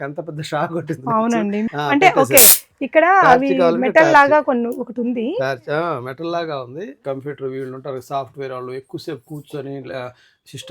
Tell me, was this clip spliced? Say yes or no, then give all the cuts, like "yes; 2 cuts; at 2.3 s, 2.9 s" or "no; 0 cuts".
yes; 2 cuts; at 1.6 s, 7.0 s